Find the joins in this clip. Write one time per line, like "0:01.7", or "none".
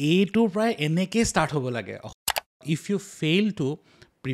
0:02.5